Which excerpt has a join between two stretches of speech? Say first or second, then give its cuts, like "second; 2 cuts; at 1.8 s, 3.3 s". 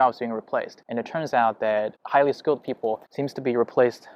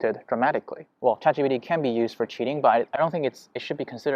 second; 2 cuts; at 0.9 s, 3.0 s